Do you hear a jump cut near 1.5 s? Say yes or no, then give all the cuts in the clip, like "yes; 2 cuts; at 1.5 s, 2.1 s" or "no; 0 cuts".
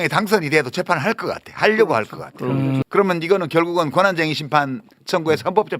no; 1 cut; at 2.8 s